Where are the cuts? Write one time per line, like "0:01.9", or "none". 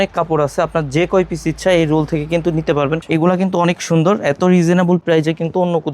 0:03.0

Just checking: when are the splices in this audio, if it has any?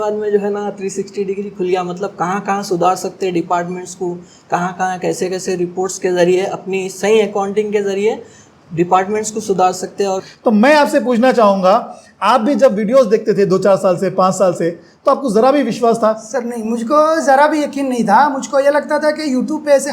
0:10.2

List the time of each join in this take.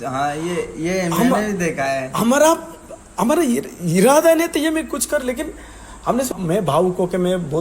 0:06.4

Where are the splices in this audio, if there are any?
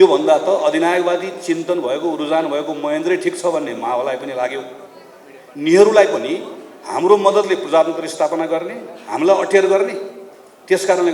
none

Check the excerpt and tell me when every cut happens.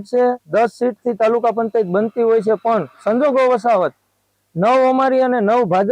none

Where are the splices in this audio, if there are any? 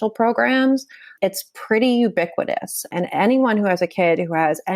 0:01.1
0:02.9

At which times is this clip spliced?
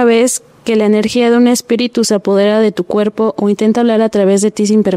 none

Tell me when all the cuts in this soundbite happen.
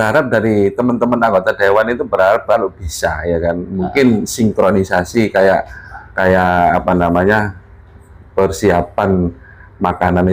none

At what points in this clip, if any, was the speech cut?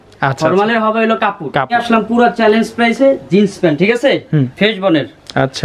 0:01.7

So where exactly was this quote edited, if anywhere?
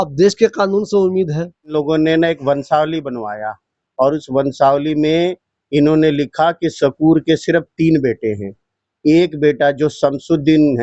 0:01.7

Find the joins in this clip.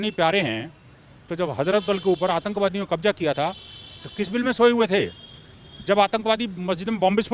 none

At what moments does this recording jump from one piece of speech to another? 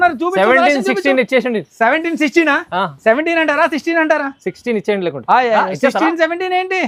none

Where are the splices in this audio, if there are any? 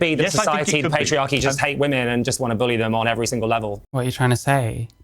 0:03.8

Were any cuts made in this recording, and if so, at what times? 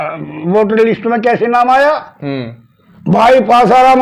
0:03.0

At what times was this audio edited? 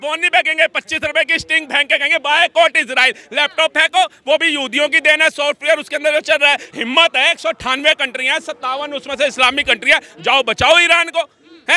0:06.7

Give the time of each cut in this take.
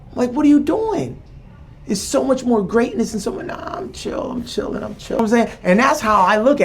0:05.2

